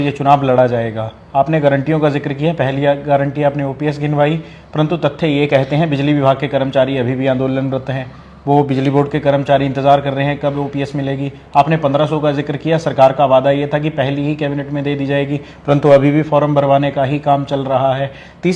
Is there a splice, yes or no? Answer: no